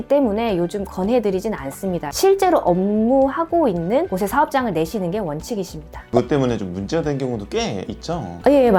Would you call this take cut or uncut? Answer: uncut